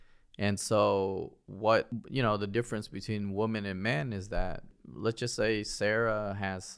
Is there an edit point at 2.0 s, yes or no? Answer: yes